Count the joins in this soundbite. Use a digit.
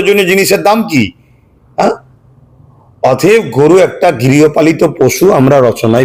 0